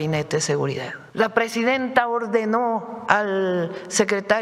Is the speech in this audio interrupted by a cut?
yes; 1 cut; at 1.0 s

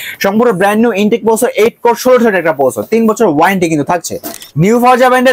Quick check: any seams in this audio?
yes; 1 cut; at 4.4 s

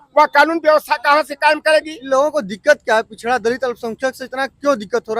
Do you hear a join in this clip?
yes; 1 cut; at 2.0 s

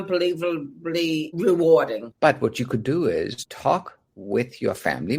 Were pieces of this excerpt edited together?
yes; 1 cut; at 2.0 s

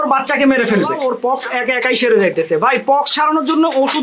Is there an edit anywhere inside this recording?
yes; 1 cut; at 0.9 s

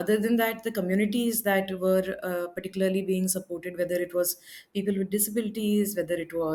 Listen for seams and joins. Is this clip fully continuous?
yes; 0 cuts

